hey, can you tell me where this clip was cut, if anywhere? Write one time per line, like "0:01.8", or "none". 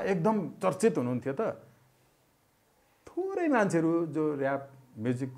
none